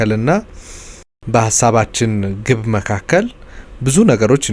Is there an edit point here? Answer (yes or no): no